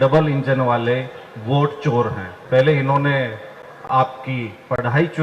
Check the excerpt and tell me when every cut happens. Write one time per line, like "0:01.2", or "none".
0:02.3